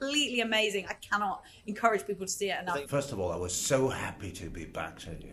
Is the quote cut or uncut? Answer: cut